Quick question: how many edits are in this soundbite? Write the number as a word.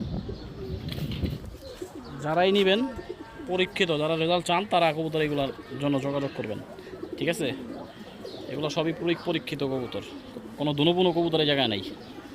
one